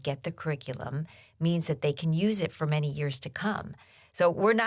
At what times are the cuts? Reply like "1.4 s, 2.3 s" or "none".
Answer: none

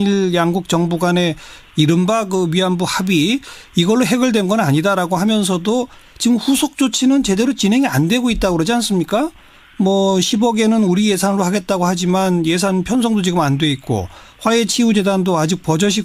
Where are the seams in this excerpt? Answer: 5.4 s

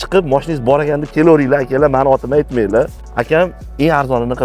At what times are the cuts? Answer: 3.1 s

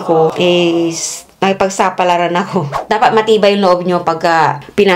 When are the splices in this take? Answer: 2.7 s

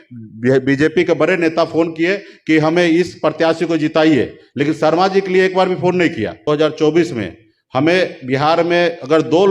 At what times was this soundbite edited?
6.5 s

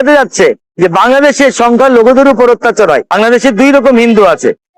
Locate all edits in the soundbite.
3.1 s

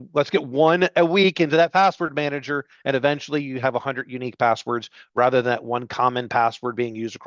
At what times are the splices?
none

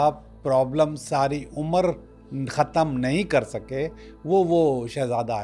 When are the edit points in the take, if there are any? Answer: none

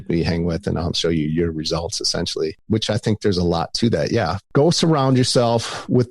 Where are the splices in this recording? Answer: 1.0 s

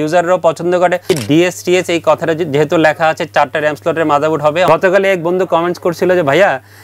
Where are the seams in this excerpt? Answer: 1.1 s, 4.7 s

